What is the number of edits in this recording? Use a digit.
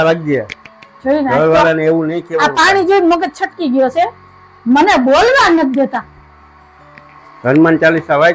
0